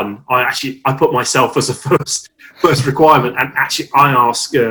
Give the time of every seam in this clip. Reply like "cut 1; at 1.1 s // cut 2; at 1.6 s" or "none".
none